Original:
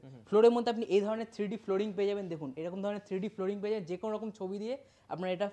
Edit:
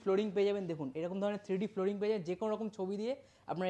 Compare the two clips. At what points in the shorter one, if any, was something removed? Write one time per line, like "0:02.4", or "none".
none